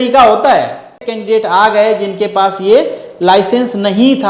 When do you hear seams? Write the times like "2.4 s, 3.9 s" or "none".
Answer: 1.1 s